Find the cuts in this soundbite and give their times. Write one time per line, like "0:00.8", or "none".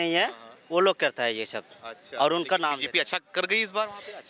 none